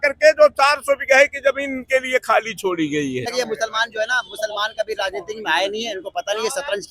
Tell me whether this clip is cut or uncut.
cut